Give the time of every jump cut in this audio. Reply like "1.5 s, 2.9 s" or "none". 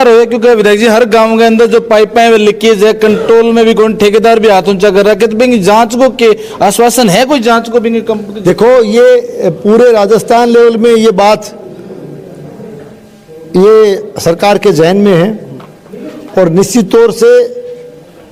none